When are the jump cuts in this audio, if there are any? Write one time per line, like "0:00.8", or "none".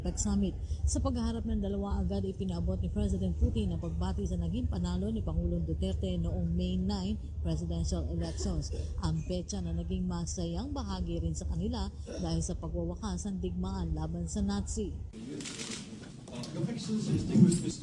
0:10.3